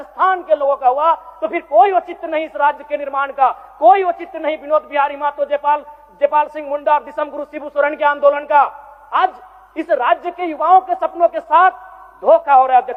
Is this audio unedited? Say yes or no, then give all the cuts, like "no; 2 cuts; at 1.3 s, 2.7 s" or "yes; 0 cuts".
yes; 0 cuts